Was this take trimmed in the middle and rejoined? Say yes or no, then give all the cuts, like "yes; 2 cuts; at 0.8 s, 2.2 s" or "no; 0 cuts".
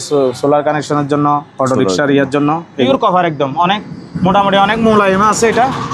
yes; 1 cut; at 2.9 s